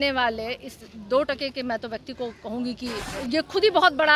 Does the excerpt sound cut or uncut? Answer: cut